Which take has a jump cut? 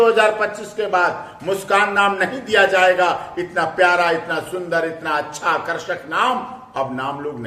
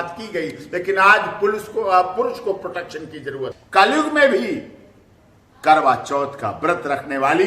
second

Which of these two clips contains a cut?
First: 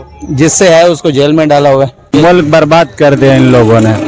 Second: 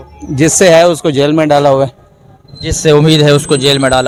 first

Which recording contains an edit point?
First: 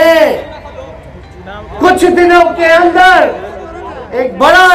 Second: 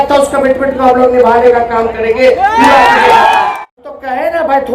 second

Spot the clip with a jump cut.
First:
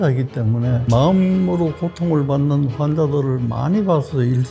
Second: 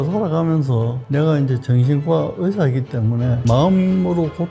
second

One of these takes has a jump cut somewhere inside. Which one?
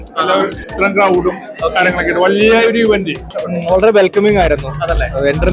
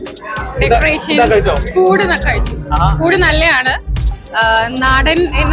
first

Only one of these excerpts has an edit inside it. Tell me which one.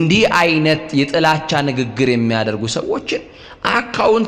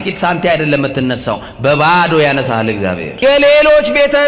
second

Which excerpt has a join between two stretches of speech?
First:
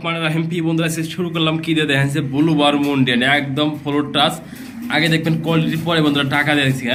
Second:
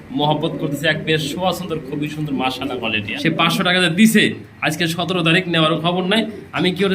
second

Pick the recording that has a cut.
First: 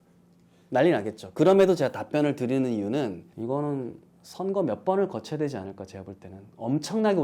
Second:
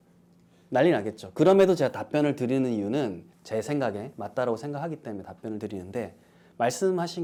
first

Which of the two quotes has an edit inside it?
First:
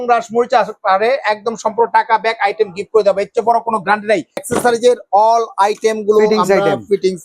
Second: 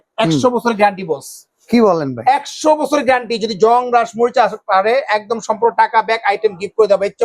first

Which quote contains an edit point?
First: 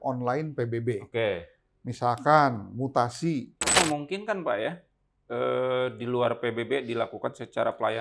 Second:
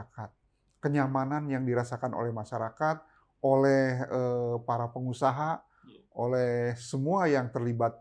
first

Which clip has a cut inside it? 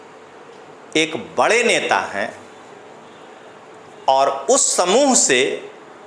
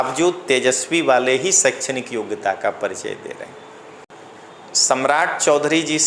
second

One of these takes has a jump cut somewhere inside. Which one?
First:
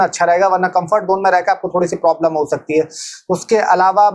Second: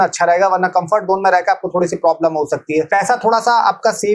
second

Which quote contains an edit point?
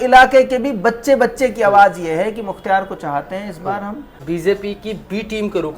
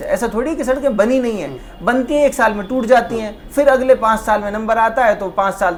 first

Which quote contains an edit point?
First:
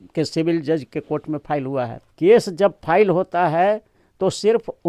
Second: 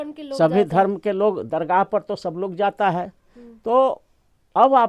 first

